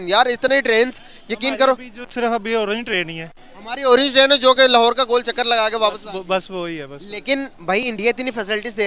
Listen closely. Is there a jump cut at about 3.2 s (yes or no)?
no